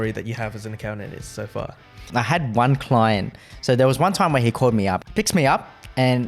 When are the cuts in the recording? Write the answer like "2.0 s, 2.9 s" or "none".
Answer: 2.0 s, 3.4 s, 5.0 s